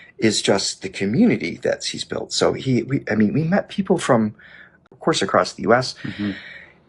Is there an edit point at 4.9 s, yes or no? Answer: yes